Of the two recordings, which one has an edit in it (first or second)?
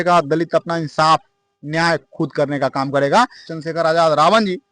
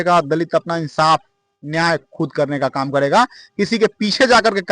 first